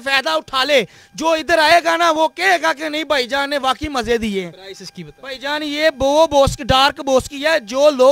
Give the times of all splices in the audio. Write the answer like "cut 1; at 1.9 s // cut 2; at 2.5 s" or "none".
none